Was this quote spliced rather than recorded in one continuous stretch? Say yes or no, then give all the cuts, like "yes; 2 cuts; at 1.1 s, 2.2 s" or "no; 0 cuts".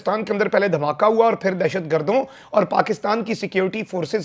no; 0 cuts